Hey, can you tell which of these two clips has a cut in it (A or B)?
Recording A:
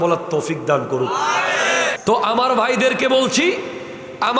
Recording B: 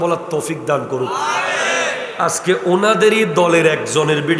A